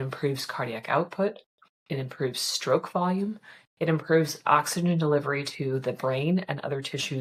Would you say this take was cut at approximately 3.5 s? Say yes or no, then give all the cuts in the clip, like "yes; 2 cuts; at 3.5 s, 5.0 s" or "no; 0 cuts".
no; 0 cuts